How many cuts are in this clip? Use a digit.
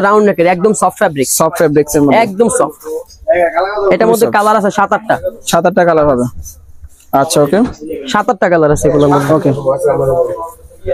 0